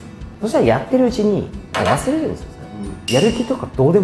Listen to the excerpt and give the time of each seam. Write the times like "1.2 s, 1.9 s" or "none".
3.0 s